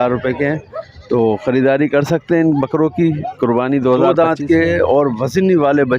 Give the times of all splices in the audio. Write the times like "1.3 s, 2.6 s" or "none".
4.1 s